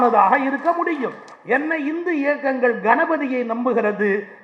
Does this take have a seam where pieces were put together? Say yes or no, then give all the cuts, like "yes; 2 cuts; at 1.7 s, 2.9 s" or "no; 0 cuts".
yes; 1 cut; at 1.3 s